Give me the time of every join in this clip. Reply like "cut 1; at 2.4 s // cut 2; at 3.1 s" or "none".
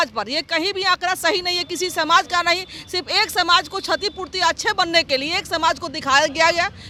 none